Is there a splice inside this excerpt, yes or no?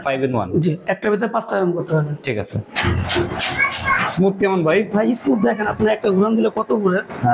yes